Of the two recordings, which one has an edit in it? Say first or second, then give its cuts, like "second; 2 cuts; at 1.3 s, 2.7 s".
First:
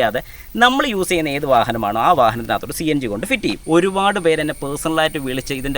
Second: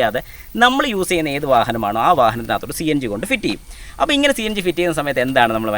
first; 1 cut; at 3.6 s